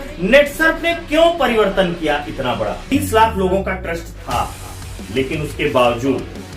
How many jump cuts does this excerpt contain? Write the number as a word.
one